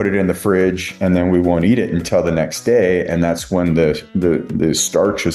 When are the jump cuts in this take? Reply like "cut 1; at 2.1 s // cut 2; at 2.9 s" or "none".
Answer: none